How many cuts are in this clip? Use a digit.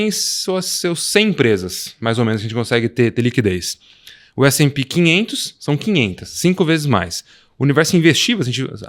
0